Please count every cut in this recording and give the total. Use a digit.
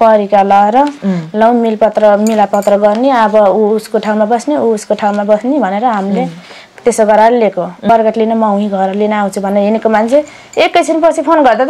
1